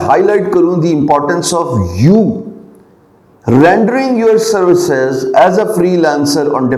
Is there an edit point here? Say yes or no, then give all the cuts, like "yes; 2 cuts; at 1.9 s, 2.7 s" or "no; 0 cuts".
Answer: no; 0 cuts